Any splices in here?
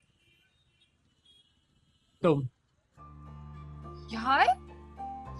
no; 0 cuts

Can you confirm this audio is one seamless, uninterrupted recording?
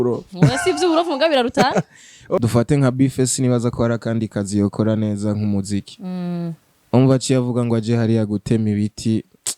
no; 1 cut; at 2.4 s

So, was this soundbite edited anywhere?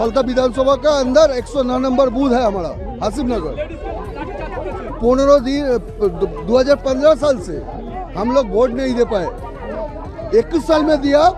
no; 0 cuts

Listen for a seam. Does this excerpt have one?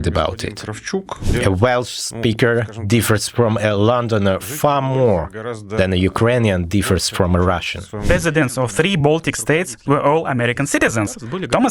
yes; 2 cuts; at 1.2 s, 8.1 s

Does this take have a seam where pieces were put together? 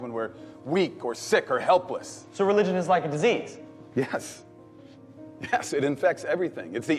yes; 1 cut; at 2.6 s

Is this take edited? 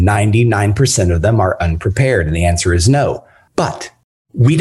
yes; 1 cut; at 3.3 s

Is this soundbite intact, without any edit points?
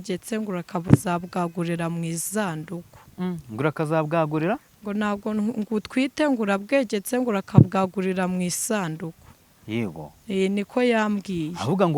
yes; 0 cuts

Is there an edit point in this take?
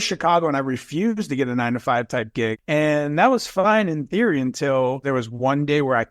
yes; 2 cuts; at 2.5 s, 5.0 s

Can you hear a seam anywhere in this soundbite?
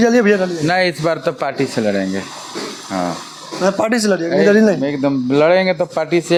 no; 0 cuts

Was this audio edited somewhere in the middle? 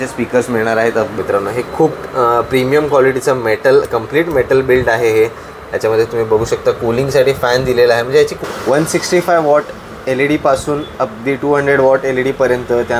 yes; 2 cuts; at 1.2 s, 8.4 s

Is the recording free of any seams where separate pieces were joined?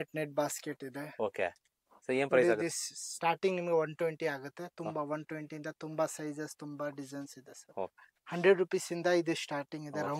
yes; 0 cuts

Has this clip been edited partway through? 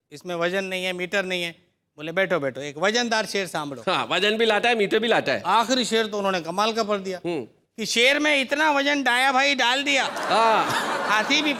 no; 0 cuts

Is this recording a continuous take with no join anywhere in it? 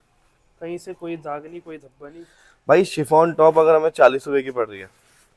yes; 0 cuts

